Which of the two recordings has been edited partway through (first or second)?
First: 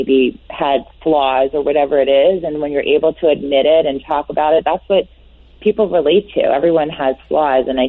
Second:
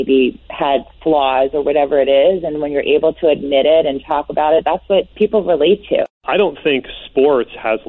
second